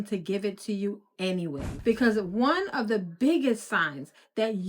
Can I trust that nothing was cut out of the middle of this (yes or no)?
no